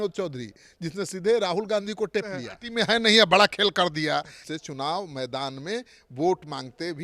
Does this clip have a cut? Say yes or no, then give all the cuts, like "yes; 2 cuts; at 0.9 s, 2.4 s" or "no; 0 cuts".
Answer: yes; 2 cuts; at 2.6 s, 4.4 s